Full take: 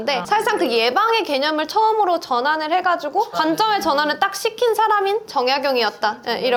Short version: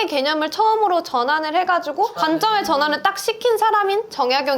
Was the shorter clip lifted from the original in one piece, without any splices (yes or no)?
yes